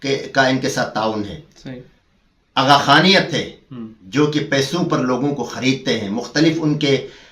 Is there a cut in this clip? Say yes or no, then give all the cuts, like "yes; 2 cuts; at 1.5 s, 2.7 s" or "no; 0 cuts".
no; 0 cuts